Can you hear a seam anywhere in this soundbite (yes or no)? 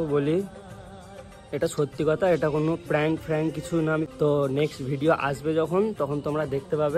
yes